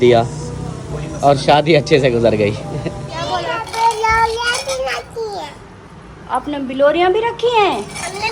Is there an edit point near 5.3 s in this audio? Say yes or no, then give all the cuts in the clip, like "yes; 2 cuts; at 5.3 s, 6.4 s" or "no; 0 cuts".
no; 1 cut; at 3.3 s